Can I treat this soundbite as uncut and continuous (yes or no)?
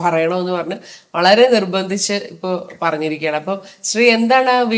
yes